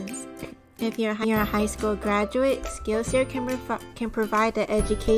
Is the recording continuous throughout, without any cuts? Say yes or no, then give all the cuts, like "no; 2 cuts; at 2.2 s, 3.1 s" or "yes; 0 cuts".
no; 1 cut; at 2.7 s